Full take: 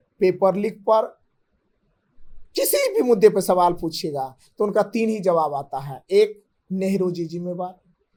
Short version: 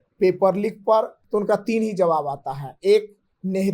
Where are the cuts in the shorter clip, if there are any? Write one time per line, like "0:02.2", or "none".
0:01.2